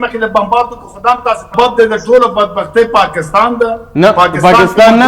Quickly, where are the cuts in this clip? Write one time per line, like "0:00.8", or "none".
0:01.5